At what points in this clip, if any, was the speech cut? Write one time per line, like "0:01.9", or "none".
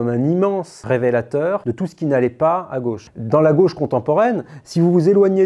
0:03.0